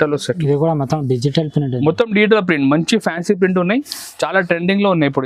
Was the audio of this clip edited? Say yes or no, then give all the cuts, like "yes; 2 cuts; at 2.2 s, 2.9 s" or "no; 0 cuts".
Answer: no; 0 cuts